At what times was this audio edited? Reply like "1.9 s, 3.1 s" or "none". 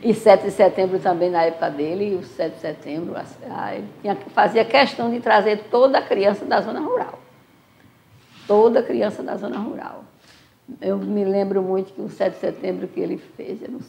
none